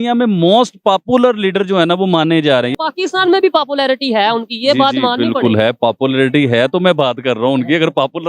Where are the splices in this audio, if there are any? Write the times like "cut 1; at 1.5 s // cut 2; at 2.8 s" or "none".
cut 1; at 2.7 s